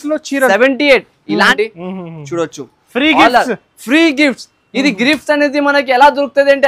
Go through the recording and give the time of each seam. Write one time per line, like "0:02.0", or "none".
0:01.5